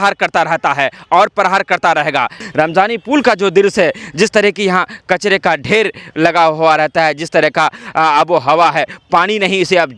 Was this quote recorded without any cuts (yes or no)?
no